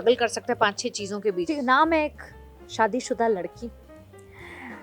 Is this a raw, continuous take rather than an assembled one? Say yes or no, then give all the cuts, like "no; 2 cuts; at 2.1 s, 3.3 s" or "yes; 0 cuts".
no; 1 cut; at 1.5 s